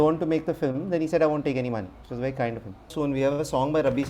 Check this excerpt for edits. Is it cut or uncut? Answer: cut